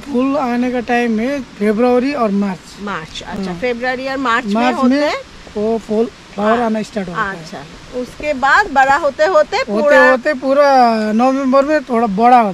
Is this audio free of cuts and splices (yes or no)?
yes